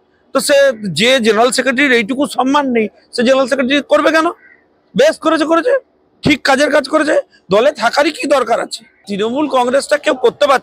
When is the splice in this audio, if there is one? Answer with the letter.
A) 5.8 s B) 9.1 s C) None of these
B